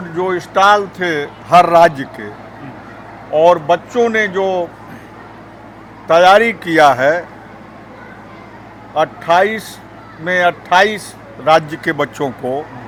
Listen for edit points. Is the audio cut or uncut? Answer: uncut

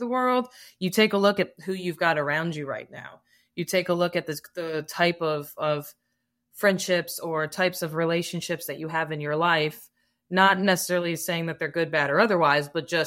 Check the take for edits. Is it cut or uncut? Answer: uncut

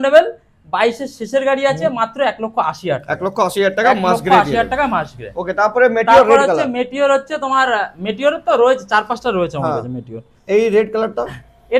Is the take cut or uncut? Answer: uncut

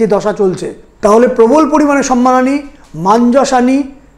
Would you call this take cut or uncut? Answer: cut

